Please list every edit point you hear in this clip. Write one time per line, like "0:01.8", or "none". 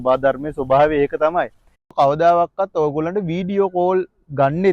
0:01.9